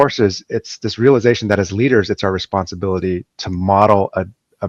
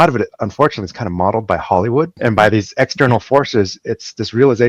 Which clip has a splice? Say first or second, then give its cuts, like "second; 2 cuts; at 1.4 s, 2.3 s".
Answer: second; 1 cut; at 2.1 s